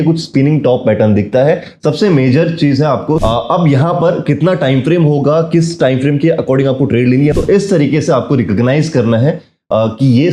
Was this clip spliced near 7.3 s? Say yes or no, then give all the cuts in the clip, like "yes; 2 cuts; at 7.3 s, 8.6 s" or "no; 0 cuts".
yes; 2 cuts; at 3.2 s, 7.3 s